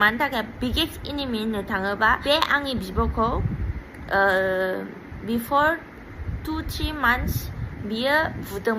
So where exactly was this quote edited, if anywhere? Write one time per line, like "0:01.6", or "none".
0:02.2

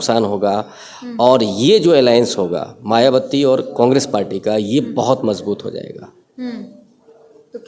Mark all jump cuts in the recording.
none

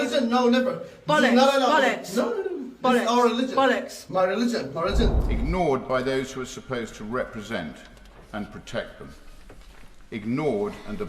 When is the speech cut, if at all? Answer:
0:05.2

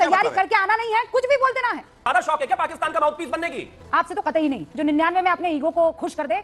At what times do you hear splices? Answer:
0:02.0
0:03.6

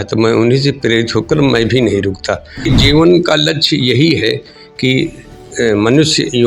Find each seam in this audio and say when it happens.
0:02.6

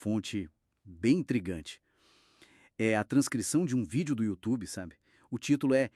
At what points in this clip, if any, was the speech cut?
none

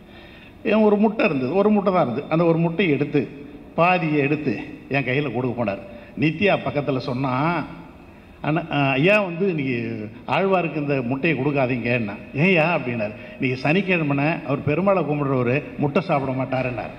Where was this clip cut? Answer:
none

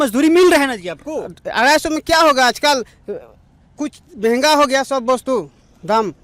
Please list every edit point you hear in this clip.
none

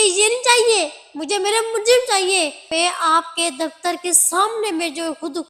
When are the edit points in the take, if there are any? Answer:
0:02.6

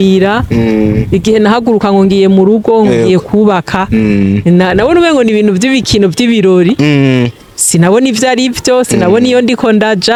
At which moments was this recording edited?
none

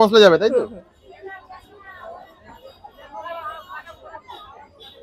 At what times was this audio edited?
none

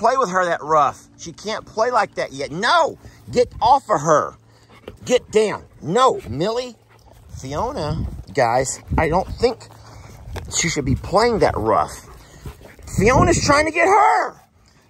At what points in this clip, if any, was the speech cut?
none

